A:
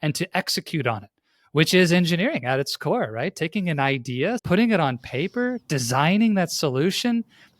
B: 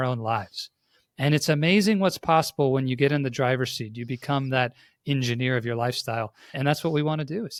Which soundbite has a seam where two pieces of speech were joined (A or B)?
A